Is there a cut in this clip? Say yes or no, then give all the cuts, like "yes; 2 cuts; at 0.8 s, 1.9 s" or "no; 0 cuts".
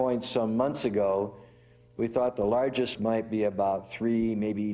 yes; 1 cut; at 2.9 s